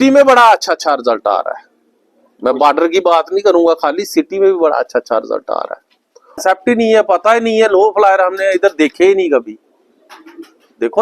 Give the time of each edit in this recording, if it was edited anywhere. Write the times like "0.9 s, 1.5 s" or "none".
6.4 s